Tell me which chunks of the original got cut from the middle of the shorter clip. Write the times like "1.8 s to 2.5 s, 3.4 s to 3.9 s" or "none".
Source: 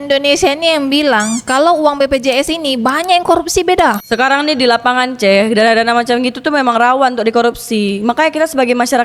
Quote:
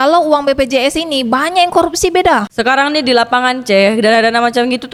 none